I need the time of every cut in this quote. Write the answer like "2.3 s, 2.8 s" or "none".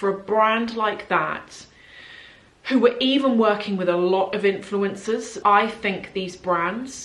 5.4 s